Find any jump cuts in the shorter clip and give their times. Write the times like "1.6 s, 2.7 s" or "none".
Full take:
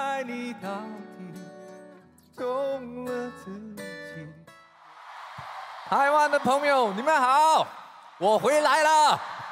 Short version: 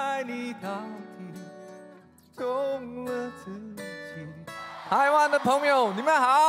4.7 s